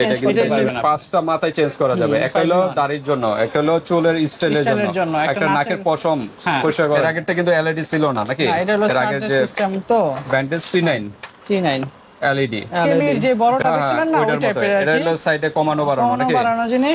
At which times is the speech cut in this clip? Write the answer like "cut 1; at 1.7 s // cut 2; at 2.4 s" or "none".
cut 1; at 7.0 s // cut 2; at 12.9 s